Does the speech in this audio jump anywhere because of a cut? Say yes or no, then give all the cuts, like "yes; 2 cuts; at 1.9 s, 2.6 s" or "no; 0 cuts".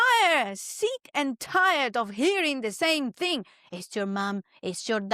no; 0 cuts